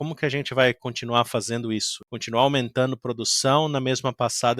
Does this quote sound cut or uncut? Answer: cut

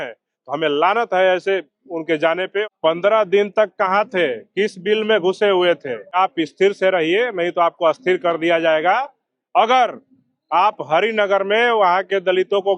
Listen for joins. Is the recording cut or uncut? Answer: cut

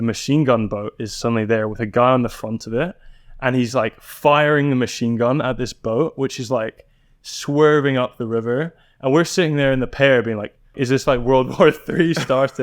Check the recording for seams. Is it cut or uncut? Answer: cut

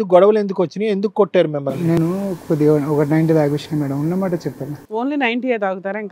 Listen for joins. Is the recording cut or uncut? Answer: uncut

